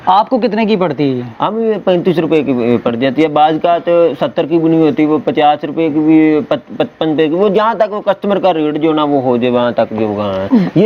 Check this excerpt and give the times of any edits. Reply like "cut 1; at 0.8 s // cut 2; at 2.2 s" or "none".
none